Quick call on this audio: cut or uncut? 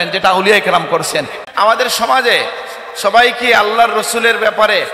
cut